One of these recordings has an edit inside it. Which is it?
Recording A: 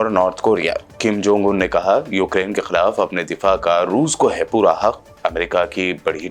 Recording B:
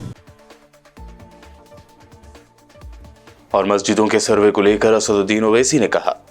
B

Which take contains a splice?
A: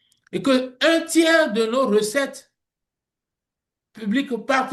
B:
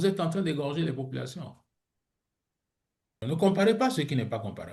B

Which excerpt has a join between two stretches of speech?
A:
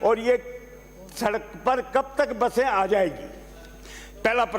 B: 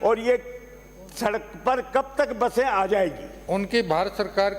B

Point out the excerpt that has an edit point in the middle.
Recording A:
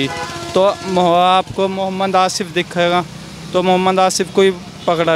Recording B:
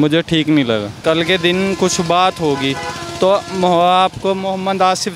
B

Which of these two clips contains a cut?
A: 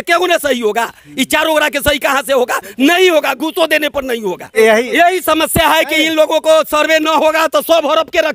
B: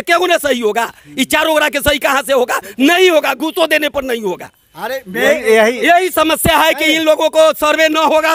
A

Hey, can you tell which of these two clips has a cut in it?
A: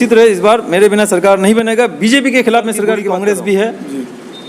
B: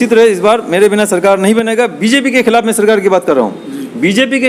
A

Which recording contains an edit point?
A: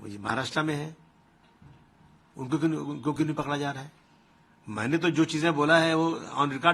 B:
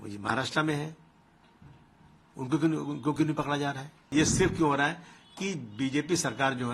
B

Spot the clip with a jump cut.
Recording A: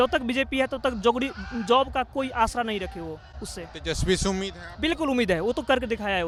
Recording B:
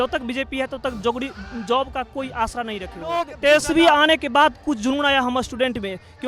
B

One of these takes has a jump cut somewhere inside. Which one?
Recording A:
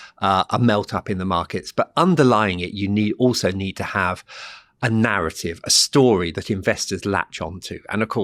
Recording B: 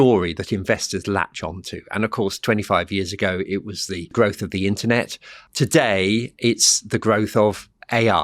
B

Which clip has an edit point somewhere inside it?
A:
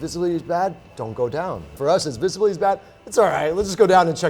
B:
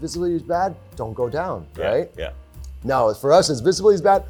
A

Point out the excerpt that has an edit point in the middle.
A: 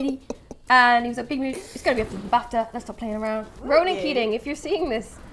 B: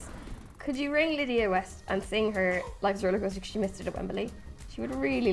A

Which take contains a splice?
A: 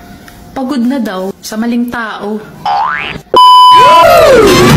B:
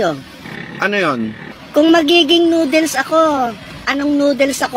A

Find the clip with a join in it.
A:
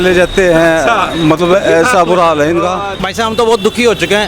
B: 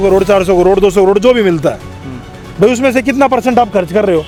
A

